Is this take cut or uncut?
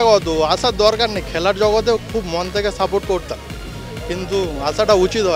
uncut